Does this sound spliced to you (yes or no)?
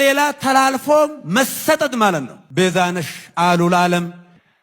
yes